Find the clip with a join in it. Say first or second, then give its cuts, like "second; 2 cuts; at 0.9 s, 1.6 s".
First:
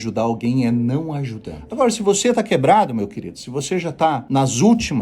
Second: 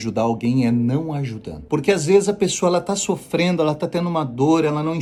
first; 2 cuts; at 1.5 s, 4.2 s